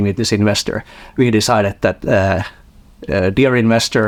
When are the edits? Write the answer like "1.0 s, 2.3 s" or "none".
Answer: none